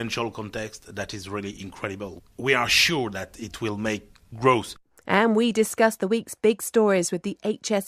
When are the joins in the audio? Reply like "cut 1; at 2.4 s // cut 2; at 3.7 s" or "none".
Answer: cut 1; at 2.2 s // cut 2; at 4.8 s